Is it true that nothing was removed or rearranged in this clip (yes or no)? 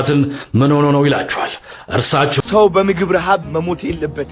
no